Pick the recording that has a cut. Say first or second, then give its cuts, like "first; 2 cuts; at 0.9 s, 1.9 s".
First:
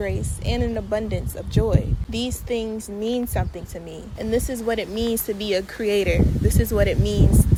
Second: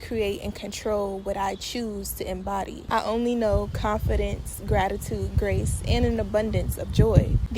second; 1 cut; at 2.8 s